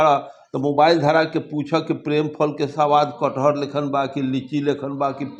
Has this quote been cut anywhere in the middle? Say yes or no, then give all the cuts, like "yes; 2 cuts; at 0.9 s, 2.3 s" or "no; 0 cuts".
no; 0 cuts